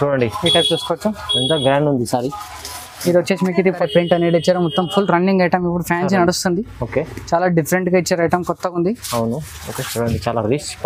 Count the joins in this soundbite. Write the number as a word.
one